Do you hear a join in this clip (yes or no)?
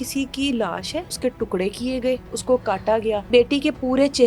yes